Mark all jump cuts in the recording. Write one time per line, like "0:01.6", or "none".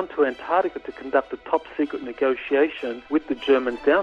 0:02.9